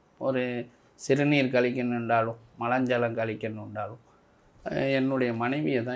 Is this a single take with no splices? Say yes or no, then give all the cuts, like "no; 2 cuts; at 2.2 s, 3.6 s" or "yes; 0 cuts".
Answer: yes; 0 cuts